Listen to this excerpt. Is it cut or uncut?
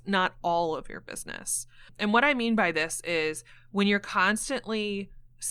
cut